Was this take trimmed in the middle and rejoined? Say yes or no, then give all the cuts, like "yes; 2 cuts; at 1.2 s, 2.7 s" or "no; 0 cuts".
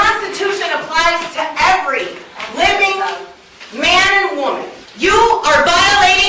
yes; 1 cut; at 4.8 s